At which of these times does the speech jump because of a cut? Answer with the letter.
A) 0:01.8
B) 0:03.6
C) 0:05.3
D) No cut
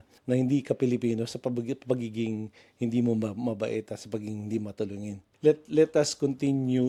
D